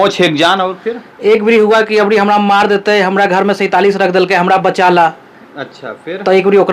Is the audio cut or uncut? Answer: uncut